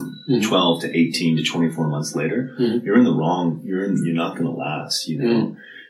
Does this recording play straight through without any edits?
yes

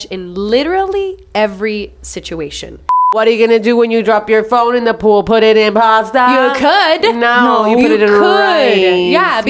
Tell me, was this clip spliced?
yes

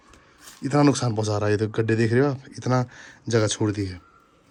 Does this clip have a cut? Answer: no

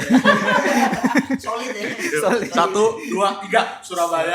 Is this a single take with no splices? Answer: yes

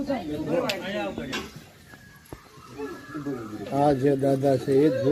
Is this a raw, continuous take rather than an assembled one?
yes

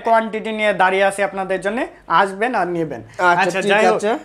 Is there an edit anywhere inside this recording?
no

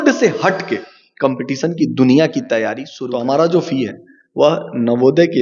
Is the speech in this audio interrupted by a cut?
yes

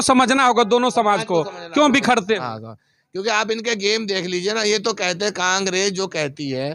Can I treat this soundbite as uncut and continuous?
yes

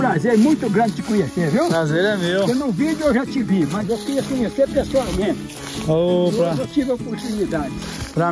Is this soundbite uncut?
yes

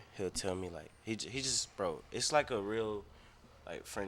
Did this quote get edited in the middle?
no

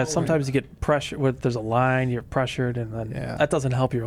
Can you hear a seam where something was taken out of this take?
no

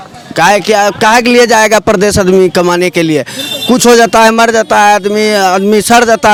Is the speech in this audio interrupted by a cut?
no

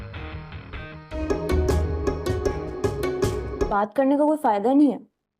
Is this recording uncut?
yes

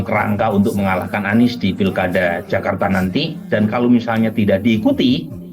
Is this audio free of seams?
no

